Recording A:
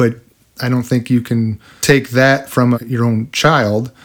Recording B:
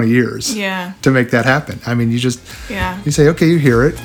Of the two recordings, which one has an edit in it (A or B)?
A